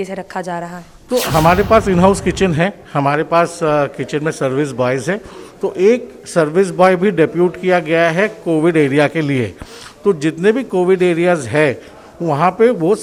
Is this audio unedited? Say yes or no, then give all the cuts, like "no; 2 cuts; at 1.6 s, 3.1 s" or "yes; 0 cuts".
yes; 0 cuts